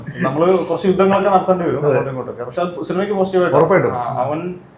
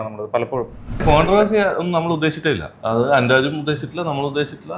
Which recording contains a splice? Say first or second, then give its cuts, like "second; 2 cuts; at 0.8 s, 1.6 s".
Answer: second; 2 cuts; at 1.0 s, 2.7 s